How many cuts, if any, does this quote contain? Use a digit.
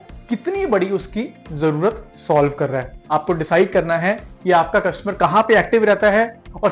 1